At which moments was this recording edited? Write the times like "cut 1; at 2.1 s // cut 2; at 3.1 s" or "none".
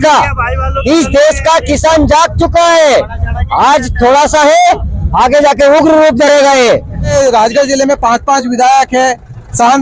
cut 1; at 7.1 s